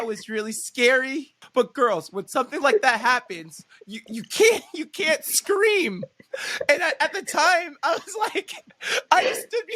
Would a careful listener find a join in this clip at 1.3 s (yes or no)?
yes